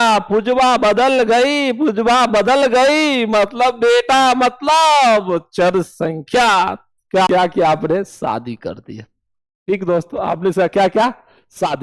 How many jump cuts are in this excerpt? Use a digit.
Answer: 1